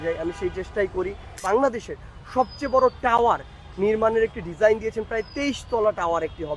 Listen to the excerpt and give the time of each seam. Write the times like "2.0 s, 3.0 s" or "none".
1.4 s

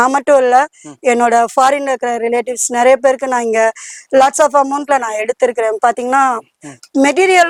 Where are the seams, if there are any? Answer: none

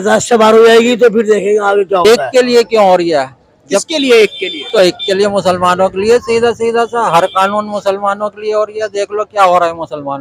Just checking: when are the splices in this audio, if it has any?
2.0 s

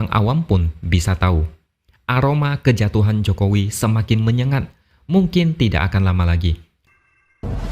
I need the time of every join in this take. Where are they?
6.7 s

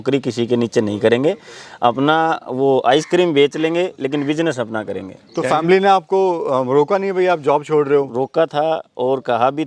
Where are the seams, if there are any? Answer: 5.3 s

